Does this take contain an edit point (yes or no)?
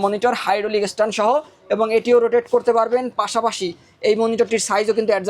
no